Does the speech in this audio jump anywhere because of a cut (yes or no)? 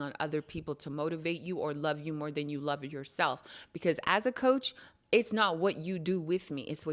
no